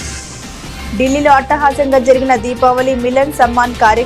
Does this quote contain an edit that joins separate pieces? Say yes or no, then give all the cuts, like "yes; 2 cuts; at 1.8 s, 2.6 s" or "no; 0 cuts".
yes; 1 cut; at 0.9 s